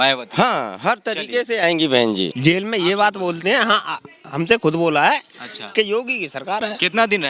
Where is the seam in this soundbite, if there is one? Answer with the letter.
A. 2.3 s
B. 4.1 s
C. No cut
A